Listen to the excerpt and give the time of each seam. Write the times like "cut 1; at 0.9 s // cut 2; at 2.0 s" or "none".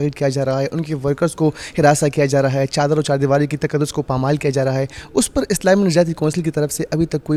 none